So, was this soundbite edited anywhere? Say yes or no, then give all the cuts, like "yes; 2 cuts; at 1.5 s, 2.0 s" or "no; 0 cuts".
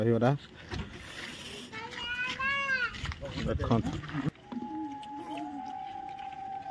yes; 1 cut; at 4.3 s